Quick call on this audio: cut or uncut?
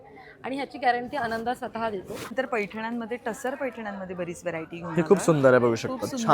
cut